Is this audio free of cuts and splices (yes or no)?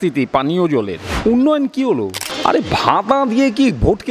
no